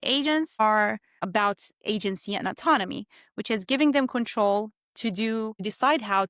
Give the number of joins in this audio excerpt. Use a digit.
1